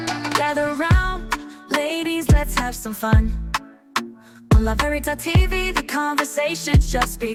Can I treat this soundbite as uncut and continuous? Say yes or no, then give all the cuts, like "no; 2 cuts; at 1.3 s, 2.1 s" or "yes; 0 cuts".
yes; 0 cuts